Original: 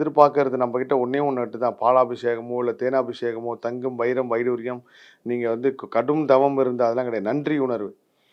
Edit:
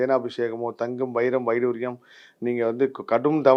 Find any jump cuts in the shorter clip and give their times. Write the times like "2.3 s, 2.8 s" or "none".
none